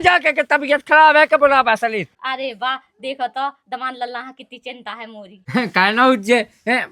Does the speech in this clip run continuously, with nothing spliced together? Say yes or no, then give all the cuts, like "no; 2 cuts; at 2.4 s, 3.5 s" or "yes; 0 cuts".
no; 2 cuts; at 2.1 s, 5.3 s